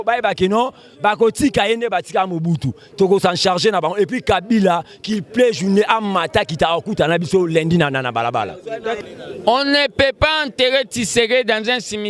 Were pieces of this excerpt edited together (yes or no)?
yes